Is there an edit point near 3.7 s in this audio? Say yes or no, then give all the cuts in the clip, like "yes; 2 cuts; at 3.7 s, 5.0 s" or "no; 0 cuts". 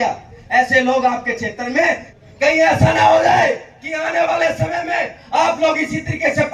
no; 1 cut; at 2.1 s